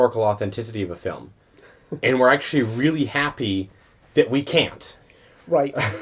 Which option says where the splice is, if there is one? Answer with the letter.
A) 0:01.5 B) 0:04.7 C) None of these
C